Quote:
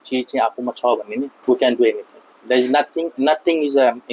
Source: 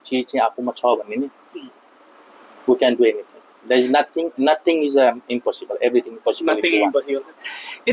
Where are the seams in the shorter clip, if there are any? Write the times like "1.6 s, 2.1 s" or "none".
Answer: 1.4 s